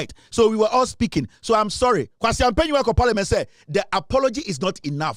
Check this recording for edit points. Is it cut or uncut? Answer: uncut